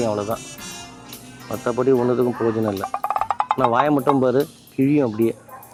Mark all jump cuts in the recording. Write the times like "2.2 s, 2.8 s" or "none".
none